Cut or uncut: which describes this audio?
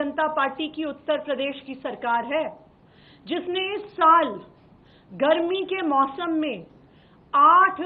uncut